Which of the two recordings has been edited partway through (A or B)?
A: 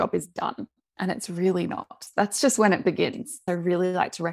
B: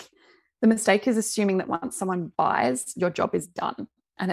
A